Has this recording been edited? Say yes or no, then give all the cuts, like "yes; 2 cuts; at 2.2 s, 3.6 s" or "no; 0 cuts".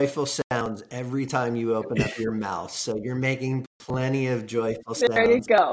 no; 0 cuts